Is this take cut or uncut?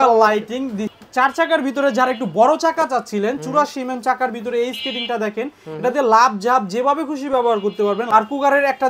cut